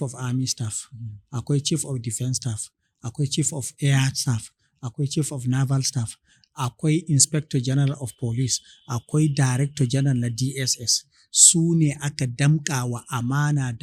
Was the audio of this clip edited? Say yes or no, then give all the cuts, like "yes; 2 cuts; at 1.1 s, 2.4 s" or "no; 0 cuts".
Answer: no; 0 cuts